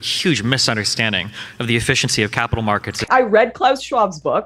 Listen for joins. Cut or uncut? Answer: cut